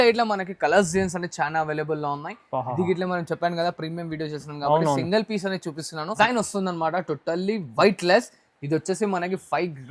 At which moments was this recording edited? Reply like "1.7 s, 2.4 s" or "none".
6.1 s